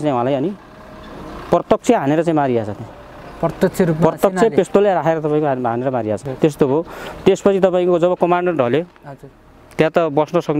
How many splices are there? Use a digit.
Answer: 1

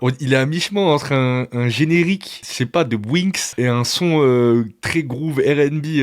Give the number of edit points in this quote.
2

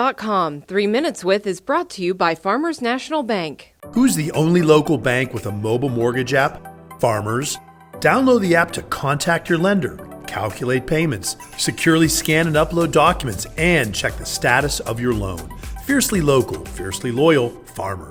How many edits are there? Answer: 0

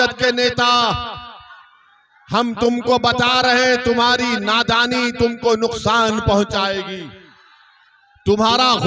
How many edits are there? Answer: 0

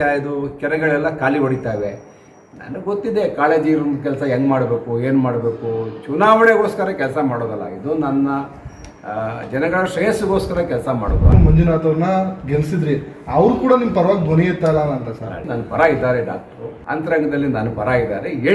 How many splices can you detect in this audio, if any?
3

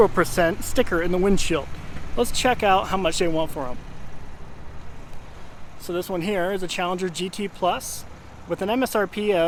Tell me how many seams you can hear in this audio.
0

